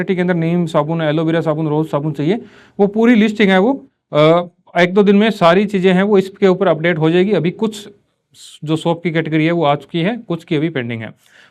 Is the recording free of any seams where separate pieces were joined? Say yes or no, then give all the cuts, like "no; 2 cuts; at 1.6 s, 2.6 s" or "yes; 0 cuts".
yes; 0 cuts